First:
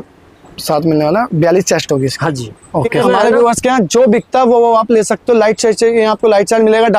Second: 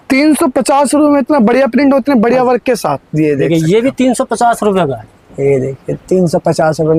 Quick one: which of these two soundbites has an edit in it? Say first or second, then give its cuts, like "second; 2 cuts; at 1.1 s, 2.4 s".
first; 1 cut; at 3.0 s